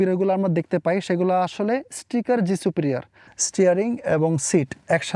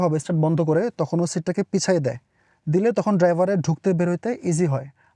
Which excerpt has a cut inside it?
first; 1 cut; at 3.2 s

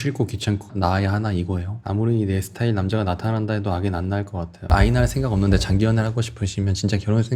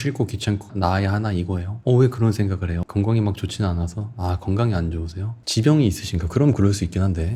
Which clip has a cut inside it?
first; 2 cuts; at 1.7 s, 4.6 s

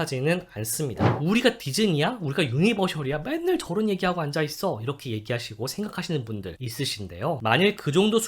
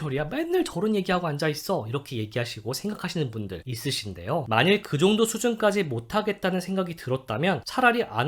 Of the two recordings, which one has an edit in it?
first; 1 cut; at 1.1 s

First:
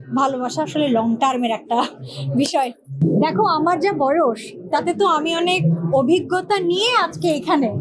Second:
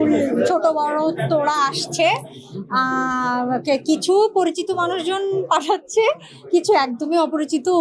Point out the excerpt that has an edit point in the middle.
first; 1 cut; at 3.0 s

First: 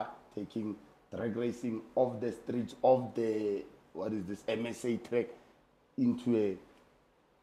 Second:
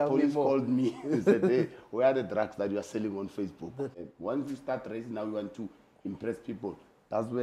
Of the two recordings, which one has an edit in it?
second; 1 cut; at 4.0 s

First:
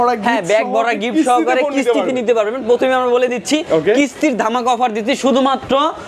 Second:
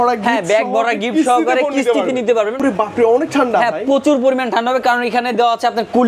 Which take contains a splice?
second; 1 cut; at 2.6 s

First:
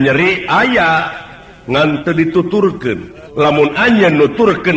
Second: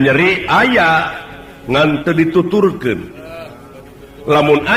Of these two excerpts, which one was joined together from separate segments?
first; 1 cut; at 3.2 s

